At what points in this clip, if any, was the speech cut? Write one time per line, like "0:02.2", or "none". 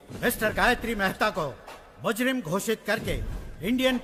none

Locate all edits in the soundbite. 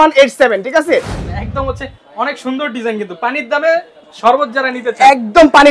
0:01.2

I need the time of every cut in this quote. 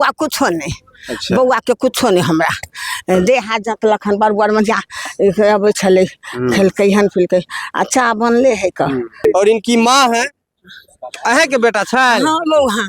0:09.2

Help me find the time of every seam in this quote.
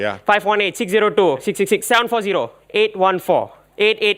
none

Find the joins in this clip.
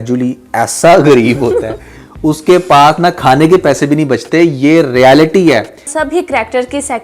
0:05.9

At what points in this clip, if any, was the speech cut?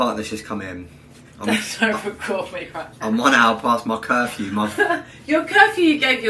none

